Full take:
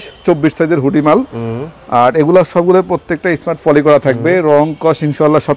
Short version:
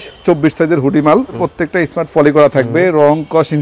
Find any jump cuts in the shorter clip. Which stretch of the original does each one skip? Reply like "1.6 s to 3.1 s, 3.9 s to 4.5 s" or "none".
1.4 s to 2.9 s